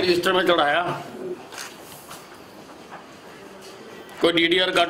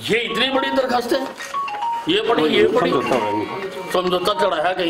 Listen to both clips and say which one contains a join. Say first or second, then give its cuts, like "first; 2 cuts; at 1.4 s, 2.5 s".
second; 1 cut; at 2.8 s